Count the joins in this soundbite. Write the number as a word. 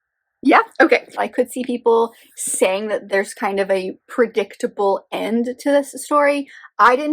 one